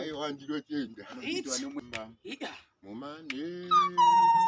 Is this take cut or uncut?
cut